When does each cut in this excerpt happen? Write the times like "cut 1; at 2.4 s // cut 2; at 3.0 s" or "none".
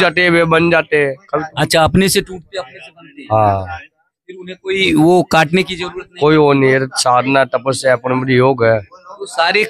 none